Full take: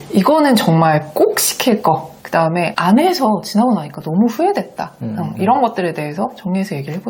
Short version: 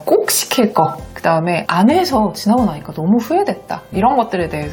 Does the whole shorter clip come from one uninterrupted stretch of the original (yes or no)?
no